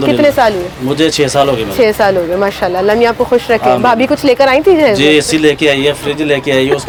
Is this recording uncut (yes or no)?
yes